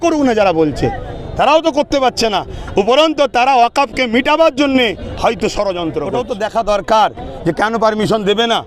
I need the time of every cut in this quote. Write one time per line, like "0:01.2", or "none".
0:06.2